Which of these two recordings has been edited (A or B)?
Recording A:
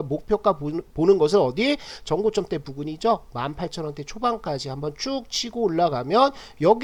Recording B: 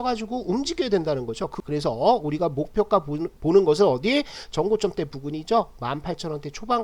B